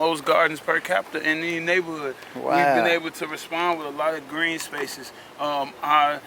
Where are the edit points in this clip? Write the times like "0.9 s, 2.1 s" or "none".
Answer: none